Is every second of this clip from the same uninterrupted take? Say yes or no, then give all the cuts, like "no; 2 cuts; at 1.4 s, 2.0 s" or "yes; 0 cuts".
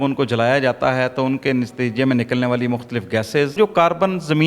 no; 1 cut; at 3.6 s